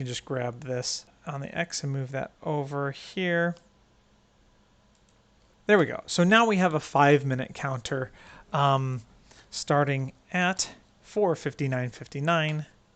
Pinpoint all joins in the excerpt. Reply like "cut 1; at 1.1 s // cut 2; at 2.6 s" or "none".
cut 1; at 1.1 s